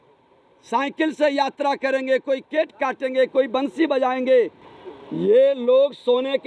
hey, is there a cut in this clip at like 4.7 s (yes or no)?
yes